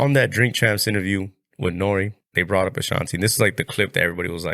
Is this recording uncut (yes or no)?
no